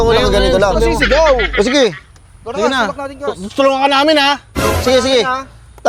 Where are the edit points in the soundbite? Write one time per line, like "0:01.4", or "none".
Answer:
none